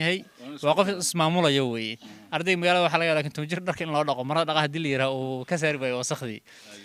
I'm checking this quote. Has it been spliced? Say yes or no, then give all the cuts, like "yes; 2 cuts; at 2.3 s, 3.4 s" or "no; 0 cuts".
no; 0 cuts